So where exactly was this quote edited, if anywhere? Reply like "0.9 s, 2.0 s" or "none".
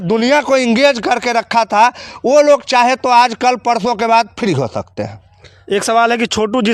none